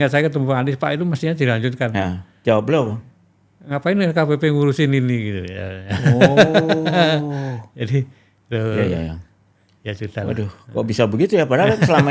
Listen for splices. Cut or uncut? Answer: uncut